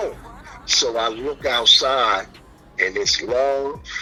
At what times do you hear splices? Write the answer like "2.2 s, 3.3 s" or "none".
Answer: none